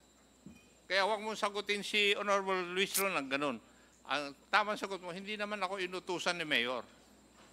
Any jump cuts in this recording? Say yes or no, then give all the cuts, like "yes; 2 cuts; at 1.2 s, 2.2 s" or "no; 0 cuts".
no; 0 cuts